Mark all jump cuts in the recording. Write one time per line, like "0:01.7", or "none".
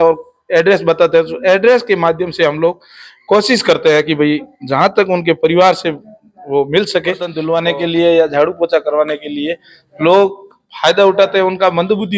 0:07.3